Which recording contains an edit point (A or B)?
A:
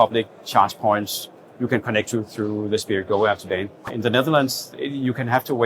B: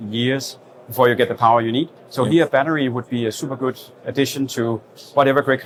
A